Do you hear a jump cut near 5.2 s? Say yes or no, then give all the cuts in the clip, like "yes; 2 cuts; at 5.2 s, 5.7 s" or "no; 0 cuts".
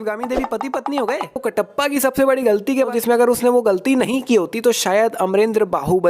no; 2 cuts; at 1.4 s, 2.9 s